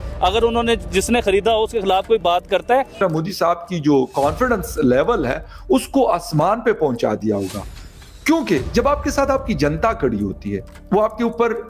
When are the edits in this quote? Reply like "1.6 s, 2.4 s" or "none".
3.0 s